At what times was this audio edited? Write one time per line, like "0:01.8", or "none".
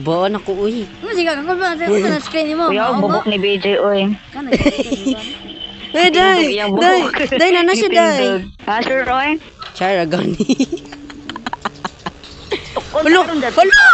0:08.5